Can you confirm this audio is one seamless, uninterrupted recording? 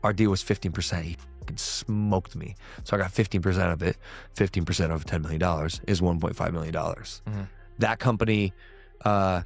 no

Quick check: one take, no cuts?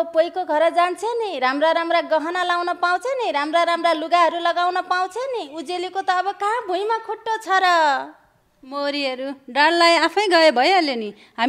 yes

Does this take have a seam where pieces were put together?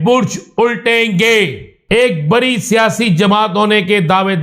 yes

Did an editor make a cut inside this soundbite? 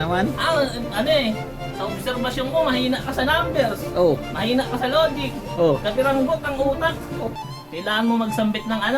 yes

